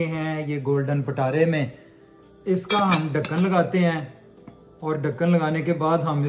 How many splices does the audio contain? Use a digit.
0